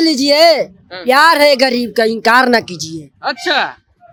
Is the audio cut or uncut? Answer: uncut